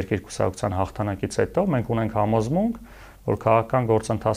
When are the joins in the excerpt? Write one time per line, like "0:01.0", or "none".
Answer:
none